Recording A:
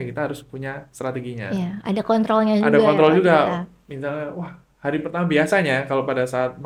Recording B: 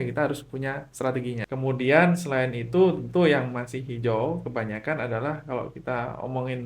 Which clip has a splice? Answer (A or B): B